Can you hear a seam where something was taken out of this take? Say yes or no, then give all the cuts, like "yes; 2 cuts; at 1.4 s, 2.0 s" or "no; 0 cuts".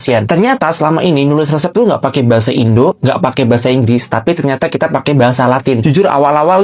no; 0 cuts